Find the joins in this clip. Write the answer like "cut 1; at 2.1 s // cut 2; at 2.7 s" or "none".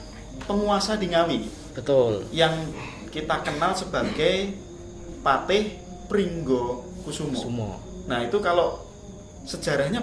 none

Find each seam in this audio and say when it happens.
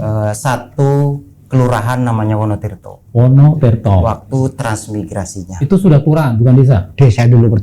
none

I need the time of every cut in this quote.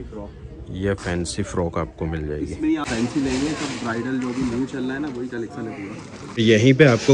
cut 1; at 2.9 s // cut 2; at 6.2 s

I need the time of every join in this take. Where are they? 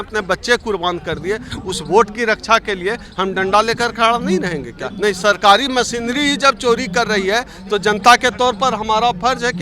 cut 1; at 4.8 s

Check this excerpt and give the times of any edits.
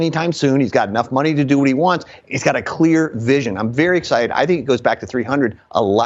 none

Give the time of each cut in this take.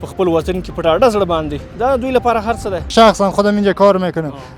cut 1; at 2.9 s

